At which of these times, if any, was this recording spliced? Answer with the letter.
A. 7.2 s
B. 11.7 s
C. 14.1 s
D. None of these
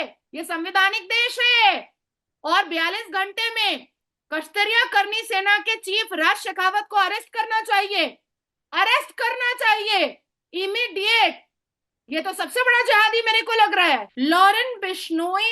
C